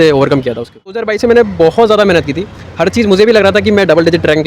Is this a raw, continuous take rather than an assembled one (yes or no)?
no